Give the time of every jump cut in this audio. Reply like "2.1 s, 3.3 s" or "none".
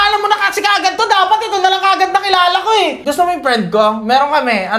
3.0 s